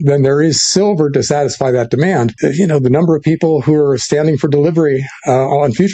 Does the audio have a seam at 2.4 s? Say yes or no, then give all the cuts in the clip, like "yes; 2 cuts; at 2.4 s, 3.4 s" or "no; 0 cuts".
yes; 1 cut; at 2.4 s